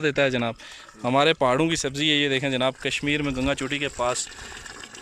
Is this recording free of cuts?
yes; 0 cuts

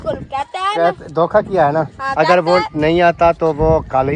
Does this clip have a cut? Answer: no; 0 cuts

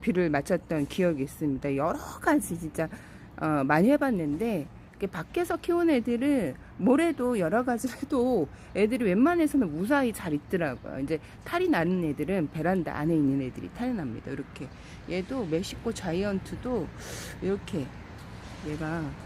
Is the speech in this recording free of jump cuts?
yes; 0 cuts

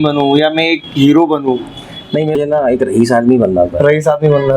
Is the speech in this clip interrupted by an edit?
yes; 1 cut; at 2.3 s

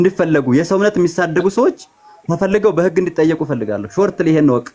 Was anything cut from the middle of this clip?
no; 0 cuts

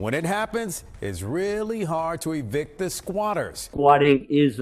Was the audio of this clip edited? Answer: yes; 1 cut; at 3.6 s

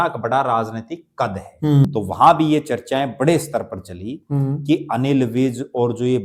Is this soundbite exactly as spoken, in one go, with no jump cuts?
no; 1 cut; at 1.9 s

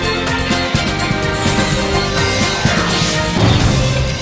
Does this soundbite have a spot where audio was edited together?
no; 0 cuts

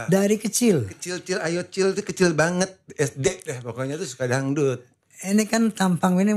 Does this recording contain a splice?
no; 0 cuts

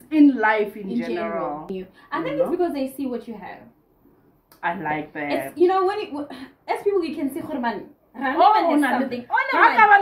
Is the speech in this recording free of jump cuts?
no; 1 cut; at 1.7 s

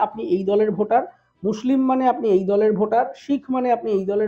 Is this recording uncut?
yes; 0 cuts

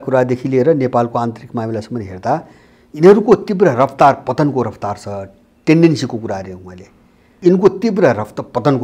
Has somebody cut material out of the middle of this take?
yes; 1 cut; at 7.2 s

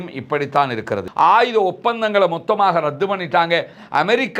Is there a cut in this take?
yes; 1 cut; at 1.1 s

